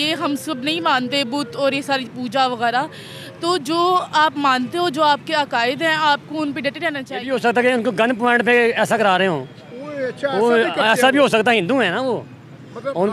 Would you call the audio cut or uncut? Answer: cut